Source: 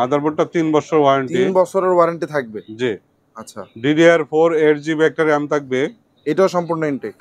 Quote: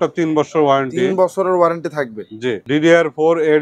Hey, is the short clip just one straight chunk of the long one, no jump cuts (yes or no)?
no